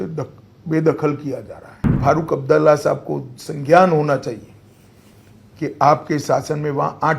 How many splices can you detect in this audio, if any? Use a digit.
1